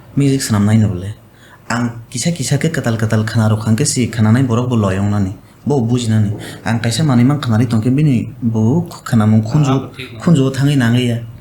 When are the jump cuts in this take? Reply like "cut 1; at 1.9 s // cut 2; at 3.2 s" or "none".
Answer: none